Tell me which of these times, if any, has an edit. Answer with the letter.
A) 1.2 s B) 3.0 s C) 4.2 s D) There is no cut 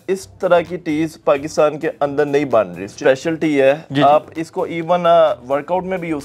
B